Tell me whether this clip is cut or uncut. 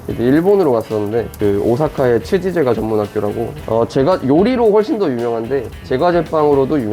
cut